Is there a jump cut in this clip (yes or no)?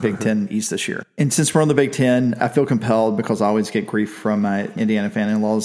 yes